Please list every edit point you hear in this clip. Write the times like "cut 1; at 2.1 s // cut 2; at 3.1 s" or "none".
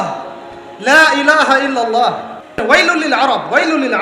cut 1; at 2.9 s